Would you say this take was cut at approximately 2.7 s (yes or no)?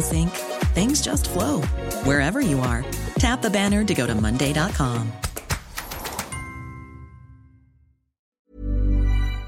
no